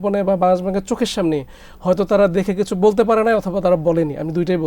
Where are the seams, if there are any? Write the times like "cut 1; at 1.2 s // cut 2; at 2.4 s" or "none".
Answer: none